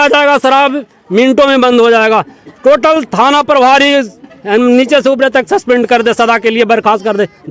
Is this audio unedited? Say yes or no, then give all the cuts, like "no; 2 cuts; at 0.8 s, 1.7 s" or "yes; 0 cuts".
yes; 0 cuts